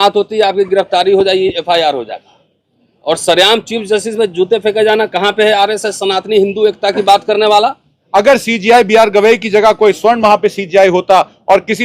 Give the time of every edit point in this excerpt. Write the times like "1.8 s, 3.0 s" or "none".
7.9 s